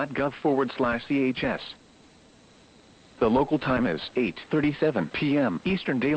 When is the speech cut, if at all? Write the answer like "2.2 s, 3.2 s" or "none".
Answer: 4.6 s